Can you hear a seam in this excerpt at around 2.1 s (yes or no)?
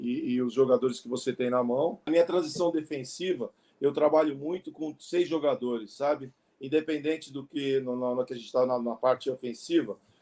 yes